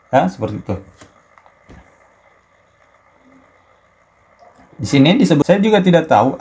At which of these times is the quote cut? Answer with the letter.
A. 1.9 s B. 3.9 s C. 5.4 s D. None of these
C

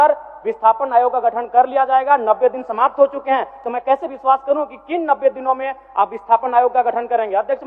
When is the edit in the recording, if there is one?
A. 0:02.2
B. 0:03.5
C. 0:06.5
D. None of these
D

